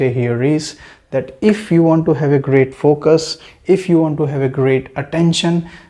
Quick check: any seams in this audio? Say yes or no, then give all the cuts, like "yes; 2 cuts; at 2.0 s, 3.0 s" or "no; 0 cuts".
no; 0 cuts